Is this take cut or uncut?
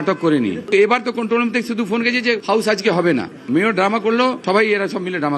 cut